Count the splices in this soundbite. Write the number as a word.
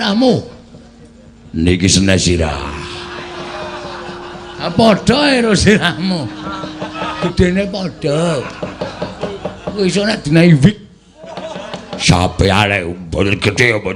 two